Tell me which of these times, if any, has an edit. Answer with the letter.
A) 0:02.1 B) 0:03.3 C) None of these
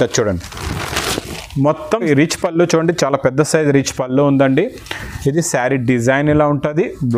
A